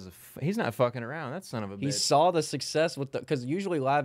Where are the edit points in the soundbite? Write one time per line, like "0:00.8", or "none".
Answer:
none